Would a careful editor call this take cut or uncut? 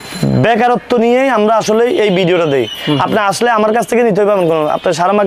uncut